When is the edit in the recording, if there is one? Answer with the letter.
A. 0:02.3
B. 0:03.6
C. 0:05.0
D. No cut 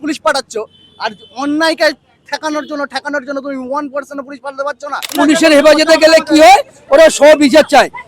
C